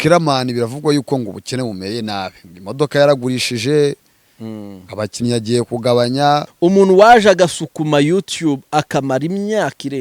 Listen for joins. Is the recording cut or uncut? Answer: cut